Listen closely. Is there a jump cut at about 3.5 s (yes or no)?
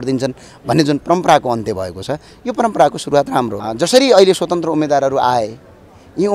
yes